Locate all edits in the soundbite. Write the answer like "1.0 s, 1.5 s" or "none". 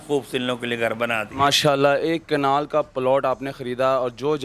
none